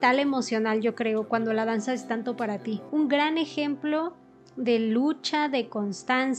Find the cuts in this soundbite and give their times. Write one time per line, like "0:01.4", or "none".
0:02.8

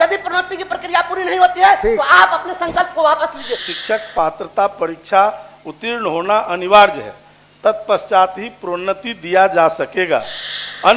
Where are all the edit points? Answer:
0:03.6

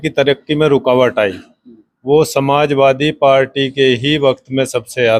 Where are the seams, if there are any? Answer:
none

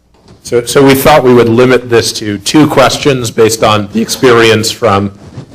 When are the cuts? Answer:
0:01.0

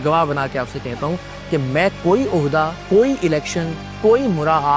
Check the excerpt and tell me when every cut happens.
0:02.8

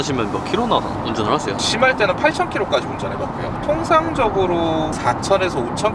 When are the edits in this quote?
none

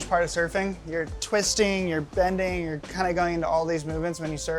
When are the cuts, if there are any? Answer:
none

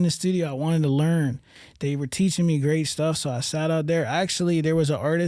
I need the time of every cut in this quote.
none

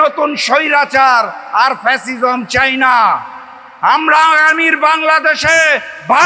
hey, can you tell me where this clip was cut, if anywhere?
none

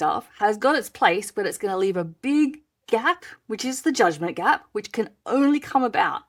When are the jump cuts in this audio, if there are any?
none

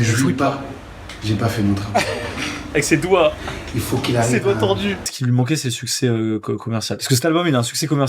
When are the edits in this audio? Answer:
0:05.1
0:07.0

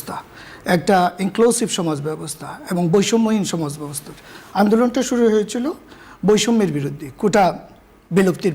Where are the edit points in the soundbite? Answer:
none

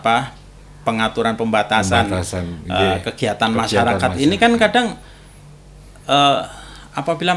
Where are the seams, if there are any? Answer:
none

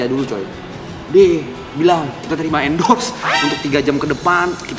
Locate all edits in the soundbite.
0:00.9

